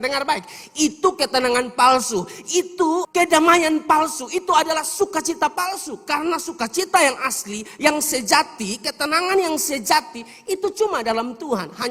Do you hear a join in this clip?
no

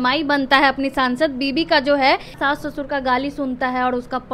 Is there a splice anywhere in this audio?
yes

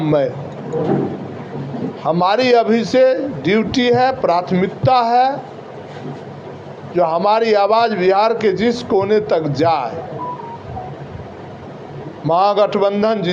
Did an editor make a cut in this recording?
no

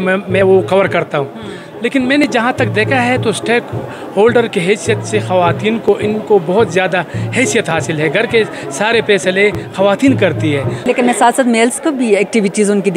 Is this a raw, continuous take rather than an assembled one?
no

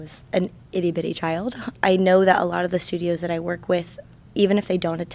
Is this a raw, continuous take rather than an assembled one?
no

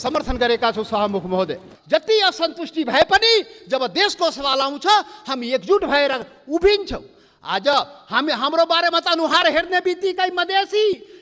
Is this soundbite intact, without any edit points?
no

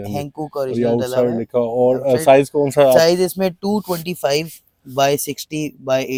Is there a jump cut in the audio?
no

